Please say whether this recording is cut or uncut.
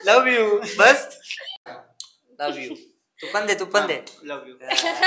cut